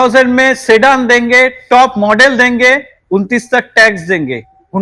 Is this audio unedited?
yes; 0 cuts

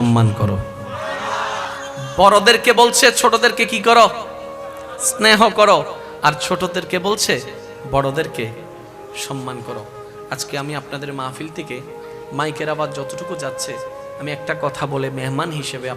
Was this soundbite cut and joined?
yes; 1 cut; at 1.7 s

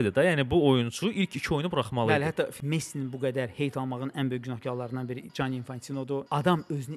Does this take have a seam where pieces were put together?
yes; 2 cuts; at 2.6 s, 6.3 s

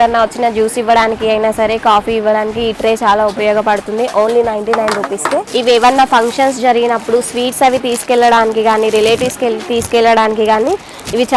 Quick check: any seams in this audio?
no; 0 cuts

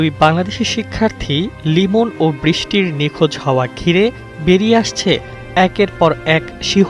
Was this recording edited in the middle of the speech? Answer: no; 0 cuts

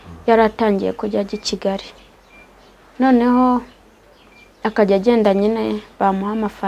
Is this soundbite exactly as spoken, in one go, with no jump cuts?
yes; 0 cuts

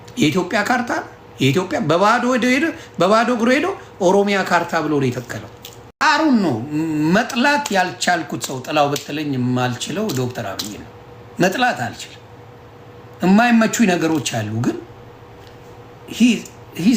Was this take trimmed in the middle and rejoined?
yes; 1 cut; at 6.0 s

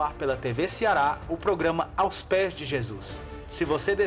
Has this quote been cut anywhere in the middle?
no; 0 cuts

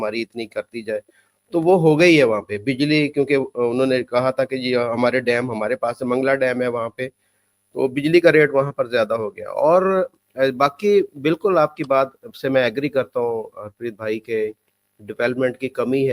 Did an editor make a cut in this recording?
no; 0 cuts

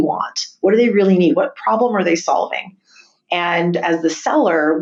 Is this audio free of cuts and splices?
yes; 0 cuts

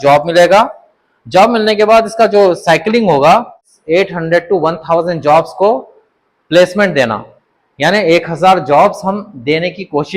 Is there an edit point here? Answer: yes; 1 cut; at 3.7 s

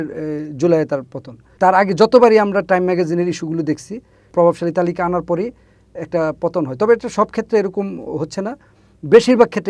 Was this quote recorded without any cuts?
no; 2 cuts; at 1.5 s, 4.3 s

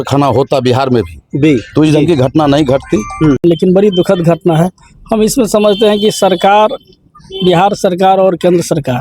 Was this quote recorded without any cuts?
no; 1 cut; at 3.4 s

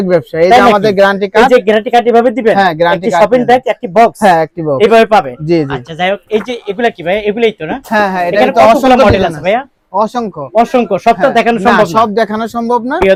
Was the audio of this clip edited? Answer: no; 0 cuts

